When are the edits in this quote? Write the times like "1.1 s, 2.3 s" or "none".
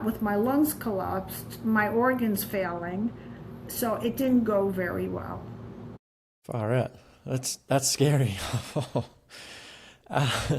none